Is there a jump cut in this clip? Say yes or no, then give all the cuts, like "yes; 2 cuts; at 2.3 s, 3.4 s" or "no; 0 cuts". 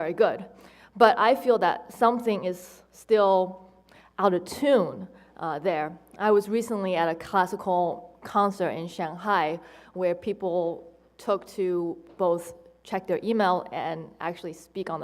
yes; 1 cut; at 1.9 s